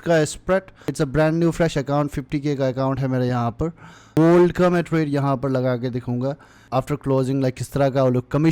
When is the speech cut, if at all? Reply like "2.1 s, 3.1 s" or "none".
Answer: 0.9 s, 4.2 s, 6.6 s